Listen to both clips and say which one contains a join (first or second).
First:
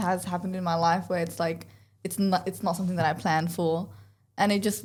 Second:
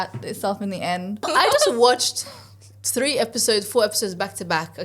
second